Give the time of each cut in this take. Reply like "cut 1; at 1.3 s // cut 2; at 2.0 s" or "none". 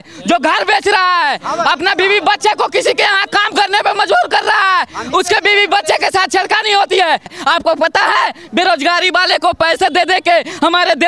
cut 1; at 7.3 s

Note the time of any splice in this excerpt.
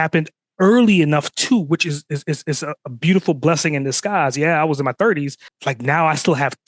cut 1; at 5.5 s

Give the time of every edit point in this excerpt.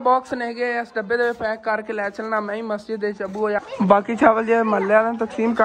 cut 1; at 3.6 s

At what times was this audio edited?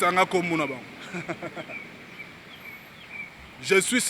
none

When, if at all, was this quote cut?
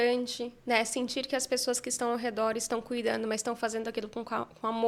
none

